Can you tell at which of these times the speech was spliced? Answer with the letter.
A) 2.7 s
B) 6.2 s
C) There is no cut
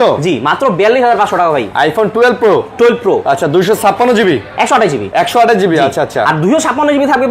C